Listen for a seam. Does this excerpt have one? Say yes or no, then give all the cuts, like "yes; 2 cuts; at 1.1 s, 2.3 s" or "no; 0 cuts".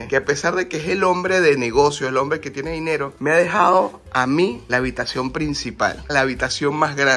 no; 0 cuts